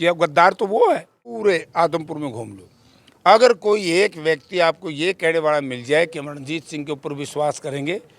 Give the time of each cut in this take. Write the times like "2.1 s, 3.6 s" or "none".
1.4 s